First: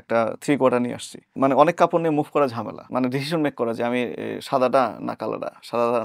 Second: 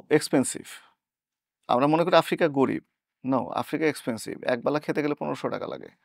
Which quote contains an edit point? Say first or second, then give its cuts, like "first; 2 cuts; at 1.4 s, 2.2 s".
first; 2 cuts; at 1.3 s, 2.7 s